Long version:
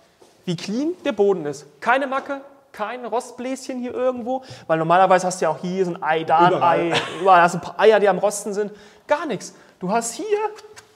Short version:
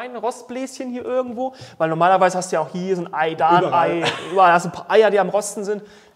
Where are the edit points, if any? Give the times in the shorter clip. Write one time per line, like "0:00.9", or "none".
none